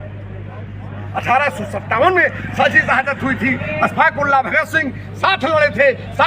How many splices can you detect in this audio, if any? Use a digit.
1